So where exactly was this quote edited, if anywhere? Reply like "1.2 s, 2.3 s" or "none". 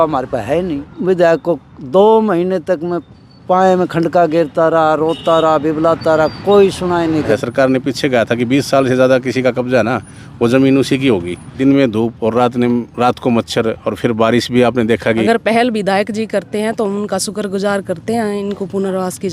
0.9 s, 7.3 s, 11.5 s, 15.2 s